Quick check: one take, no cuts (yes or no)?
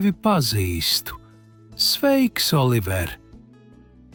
yes